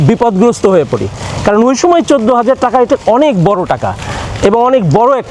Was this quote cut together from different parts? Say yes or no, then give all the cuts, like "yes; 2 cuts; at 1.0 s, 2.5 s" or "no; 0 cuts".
no; 0 cuts